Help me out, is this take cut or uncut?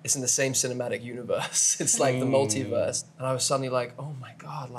cut